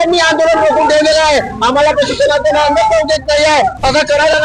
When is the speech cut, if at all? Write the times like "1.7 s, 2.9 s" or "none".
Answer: none